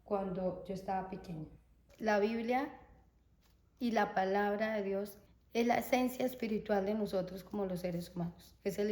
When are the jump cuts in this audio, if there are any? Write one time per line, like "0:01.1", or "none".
0:01.8
0:05.2